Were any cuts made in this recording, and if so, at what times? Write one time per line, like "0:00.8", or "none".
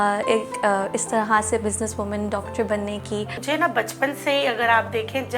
0:03.4

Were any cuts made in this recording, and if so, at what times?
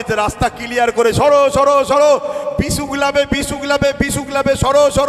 none

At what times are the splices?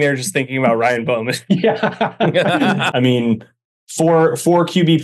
0:02.9

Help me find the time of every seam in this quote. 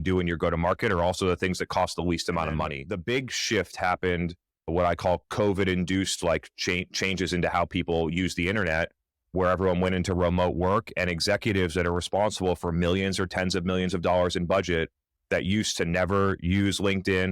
0:02.8

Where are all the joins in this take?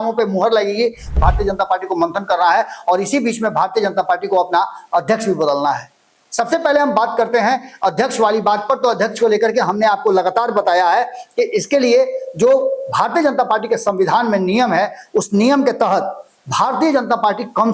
0:01.1

